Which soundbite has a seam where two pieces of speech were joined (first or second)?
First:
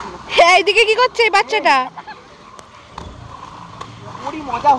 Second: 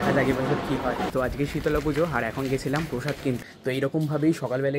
second